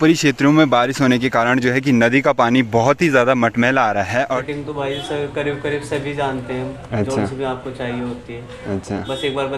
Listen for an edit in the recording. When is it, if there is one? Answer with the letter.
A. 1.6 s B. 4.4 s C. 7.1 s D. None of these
B